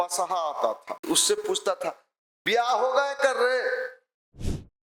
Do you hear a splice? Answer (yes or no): yes